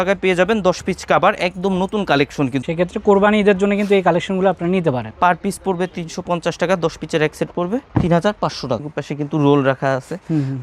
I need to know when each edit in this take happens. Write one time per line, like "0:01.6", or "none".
0:02.6
0:05.1
0:09.0